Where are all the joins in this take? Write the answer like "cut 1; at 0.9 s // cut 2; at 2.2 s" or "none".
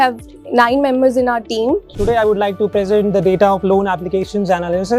cut 1; at 1.9 s